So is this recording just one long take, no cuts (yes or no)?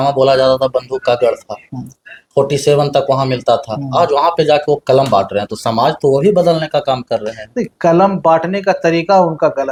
yes